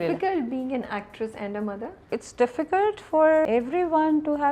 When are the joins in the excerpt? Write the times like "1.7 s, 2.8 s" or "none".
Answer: 2.0 s, 3.5 s